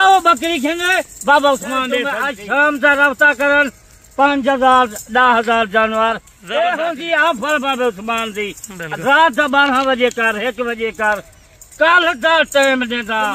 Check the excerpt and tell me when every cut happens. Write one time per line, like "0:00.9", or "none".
0:02.3
0:06.3